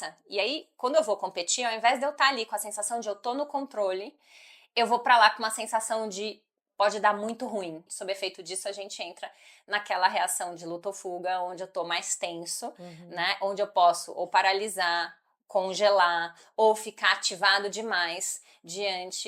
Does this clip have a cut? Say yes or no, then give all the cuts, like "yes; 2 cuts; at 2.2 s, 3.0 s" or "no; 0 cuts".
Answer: yes; 1 cut; at 7.9 s